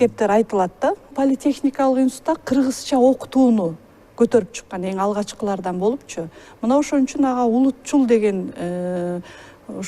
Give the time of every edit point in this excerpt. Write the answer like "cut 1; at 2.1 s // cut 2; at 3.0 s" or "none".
cut 1; at 1.1 s